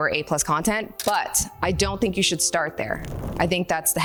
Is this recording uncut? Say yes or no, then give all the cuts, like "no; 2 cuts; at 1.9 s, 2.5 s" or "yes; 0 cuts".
yes; 0 cuts